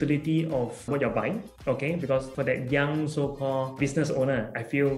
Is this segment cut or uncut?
cut